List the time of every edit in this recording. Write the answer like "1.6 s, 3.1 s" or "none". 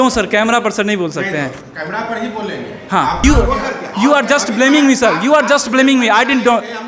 3.2 s